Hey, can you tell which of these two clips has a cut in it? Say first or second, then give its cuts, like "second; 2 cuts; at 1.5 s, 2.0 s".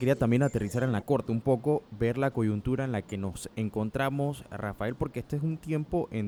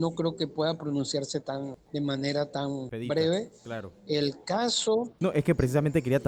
second; 3 cuts; at 1.8 s, 2.9 s, 5.1 s